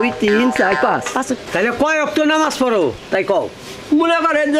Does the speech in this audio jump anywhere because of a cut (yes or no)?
yes